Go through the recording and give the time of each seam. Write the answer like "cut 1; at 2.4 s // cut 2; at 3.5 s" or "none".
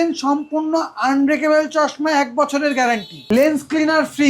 cut 1; at 3.2 s